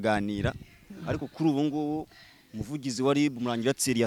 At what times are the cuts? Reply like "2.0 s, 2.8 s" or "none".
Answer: none